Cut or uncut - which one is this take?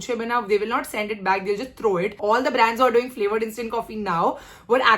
cut